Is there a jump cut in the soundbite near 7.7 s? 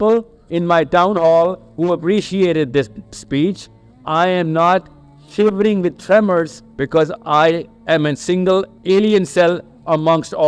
yes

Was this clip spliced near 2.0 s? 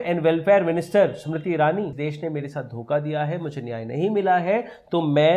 yes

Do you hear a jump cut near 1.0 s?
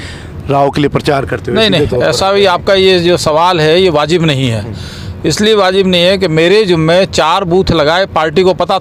no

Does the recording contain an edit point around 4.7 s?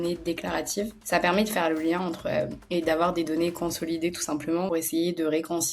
yes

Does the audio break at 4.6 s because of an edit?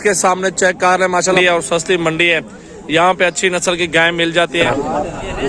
yes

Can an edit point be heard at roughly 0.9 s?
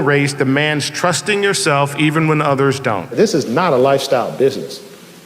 no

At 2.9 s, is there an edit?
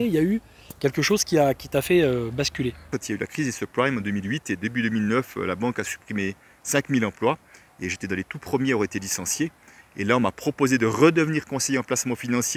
yes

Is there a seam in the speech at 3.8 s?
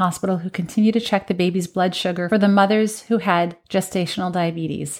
no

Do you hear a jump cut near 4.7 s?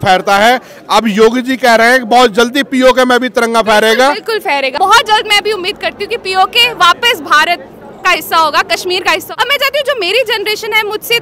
yes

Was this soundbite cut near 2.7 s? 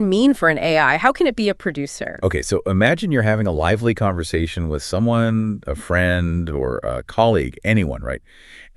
no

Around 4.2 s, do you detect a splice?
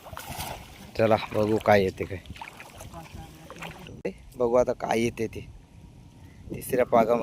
yes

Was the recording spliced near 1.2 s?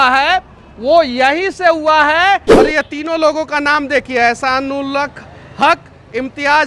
no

